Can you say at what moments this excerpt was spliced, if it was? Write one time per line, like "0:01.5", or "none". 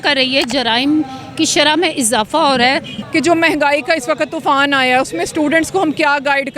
0:02.9